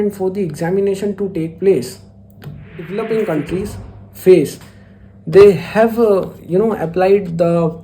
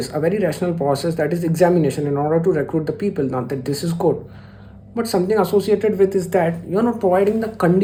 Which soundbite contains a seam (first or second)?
first